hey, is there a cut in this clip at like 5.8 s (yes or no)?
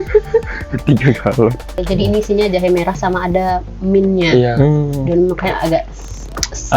no